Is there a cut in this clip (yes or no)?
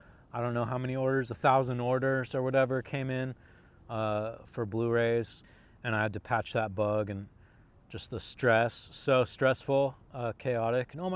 yes